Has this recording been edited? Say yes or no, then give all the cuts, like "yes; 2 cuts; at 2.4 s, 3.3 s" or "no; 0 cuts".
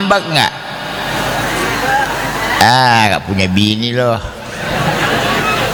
no; 0 cuts